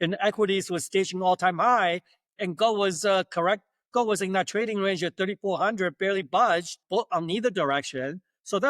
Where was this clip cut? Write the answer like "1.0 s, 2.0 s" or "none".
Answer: 6.8 s